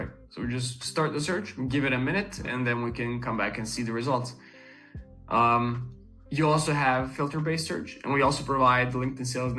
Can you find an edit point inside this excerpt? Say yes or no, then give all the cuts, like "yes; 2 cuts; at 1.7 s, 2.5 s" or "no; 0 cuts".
no; 0 cuts